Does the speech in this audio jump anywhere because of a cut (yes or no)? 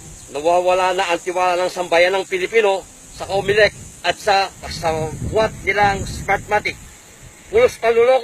yes